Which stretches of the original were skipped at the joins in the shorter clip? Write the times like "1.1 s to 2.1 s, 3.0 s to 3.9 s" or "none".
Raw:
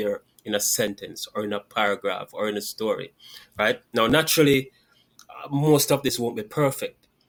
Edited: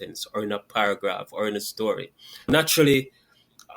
3.5 s to 4.1 s